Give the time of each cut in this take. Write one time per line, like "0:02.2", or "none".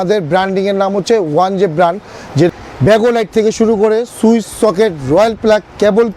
0:02.5